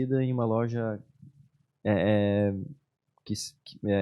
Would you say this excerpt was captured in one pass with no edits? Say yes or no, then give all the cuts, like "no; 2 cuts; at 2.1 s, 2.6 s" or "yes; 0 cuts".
yes; 0 cuts